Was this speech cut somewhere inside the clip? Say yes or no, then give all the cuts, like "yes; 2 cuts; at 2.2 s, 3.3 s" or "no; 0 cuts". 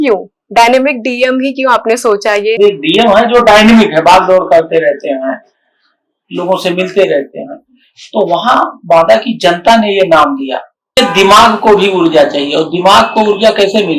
yes; 2 cuts; at 2.6 s, 10.9 s